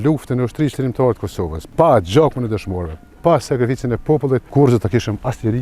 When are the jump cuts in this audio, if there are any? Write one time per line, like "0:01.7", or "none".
0:01.6
0:04.5